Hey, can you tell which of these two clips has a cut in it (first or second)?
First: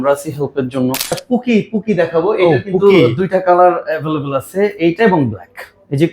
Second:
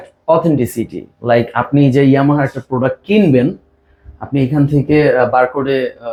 first